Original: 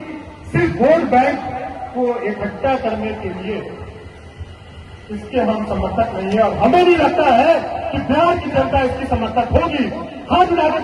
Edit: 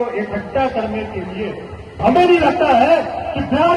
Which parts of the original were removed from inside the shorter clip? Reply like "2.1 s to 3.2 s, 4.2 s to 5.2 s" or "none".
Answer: 4.1 s to 6.6 s